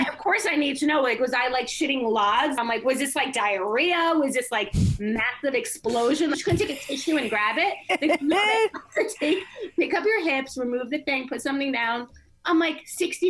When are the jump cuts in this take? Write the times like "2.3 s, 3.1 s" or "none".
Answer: 2.6 s, 6.4 s